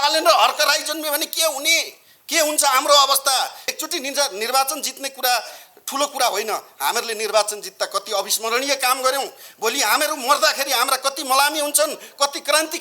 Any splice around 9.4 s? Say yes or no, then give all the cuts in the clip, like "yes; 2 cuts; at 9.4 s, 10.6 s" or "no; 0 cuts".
no; 1 cut; at 3.7 s